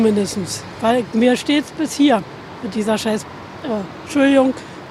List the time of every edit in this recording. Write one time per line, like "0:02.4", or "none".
none